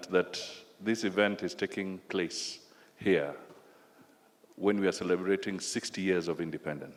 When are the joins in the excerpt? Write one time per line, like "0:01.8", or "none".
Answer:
none